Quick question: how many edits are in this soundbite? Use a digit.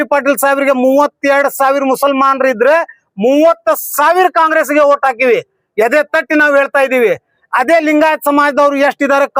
0